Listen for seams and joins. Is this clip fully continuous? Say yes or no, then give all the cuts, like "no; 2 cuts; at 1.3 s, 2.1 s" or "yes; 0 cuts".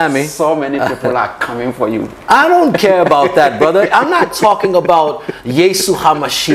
yes; 0 cuts